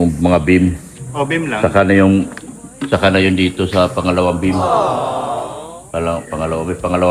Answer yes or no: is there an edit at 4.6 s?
no